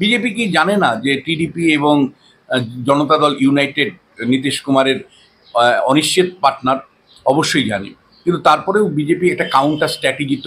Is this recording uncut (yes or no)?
yes